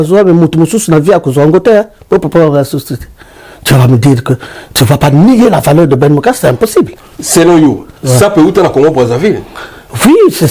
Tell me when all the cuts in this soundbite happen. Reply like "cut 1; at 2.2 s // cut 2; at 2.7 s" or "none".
cut 1; at 7.0 s